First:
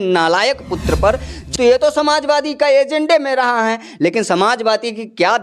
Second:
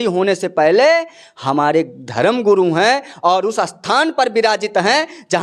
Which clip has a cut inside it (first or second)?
first